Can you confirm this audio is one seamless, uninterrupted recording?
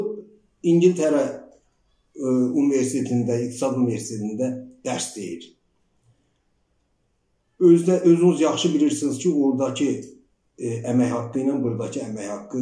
yes; 0 cuts

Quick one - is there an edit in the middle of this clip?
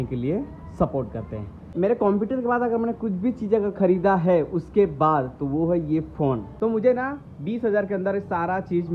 yes; 2 cuts; at 1.6 s, 6.5 s

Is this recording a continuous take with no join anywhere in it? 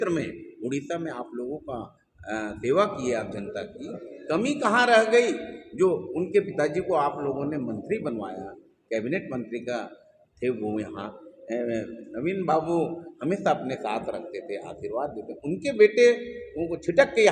yes; 0 cuts

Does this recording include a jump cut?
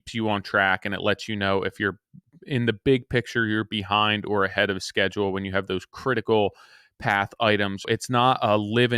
yes; 1 cut; at 7.8 s

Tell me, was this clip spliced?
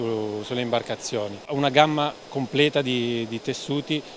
yes; 1 cut; at 1.5 s

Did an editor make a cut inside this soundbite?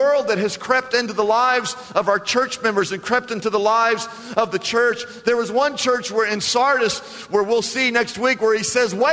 no; 0 cuts

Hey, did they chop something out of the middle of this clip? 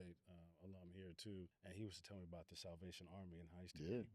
yes; 1 cut; at 1.6 s

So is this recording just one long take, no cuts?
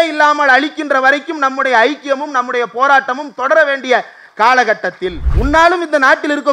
no; 1 cut; at 5.3 s

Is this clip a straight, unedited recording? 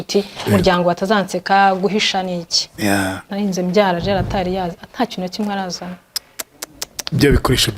no; 1 cut; at 3.3 s

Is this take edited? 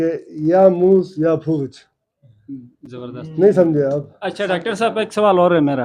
no; 0 cuts

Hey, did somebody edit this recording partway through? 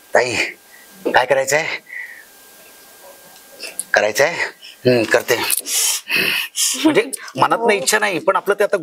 no; 0 cuts

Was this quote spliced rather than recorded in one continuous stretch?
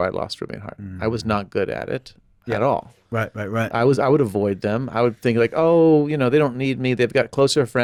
no; 0 cuts

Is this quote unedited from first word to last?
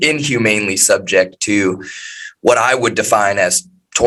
yes; 0 cuts

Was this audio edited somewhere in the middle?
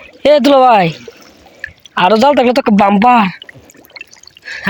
no; 0 cuts

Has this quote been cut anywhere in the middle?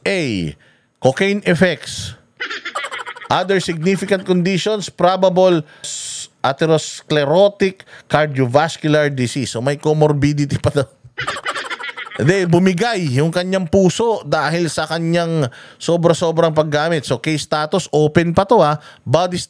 yes; 1 cut; at 6.0 s

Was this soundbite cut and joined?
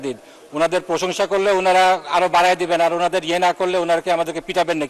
no; 0 cuts

